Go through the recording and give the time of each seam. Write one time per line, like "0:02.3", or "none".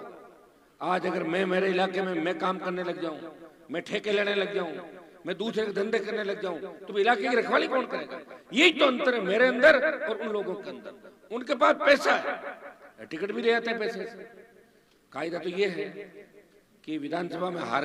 none